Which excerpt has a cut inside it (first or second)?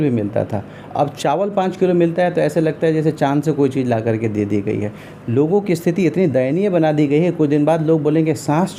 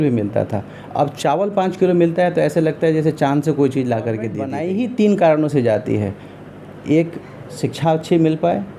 second